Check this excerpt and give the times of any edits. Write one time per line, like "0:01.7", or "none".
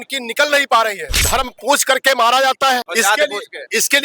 0:01.1
0:02.9